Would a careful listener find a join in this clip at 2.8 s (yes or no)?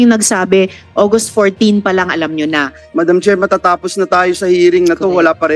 yes